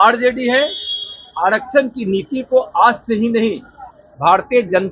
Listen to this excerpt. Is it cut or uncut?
uncut